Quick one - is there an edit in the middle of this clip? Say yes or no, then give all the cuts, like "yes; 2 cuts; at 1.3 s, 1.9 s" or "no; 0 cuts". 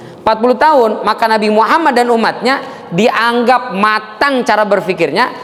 no; 0 cuts